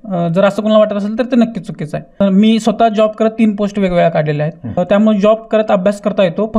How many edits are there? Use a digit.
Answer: 2